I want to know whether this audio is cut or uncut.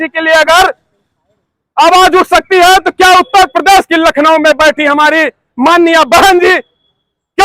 uncut